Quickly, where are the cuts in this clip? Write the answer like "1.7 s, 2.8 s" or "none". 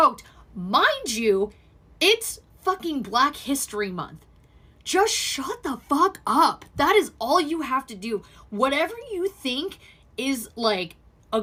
none

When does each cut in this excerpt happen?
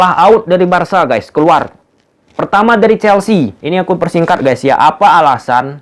3.6 s

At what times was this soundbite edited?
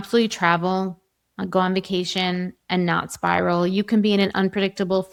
none

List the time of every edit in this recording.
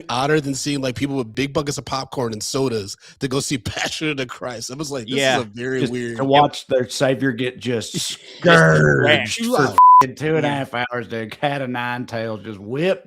1.3 s

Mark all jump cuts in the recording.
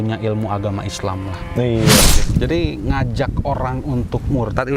2.2 s

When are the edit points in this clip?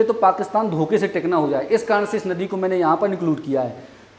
none

